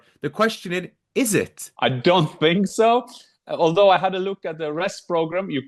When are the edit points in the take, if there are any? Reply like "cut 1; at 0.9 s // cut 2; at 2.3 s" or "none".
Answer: cut 1; at 1.6 s